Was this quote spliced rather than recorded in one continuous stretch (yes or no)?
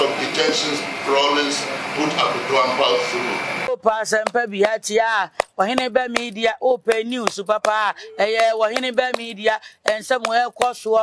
yes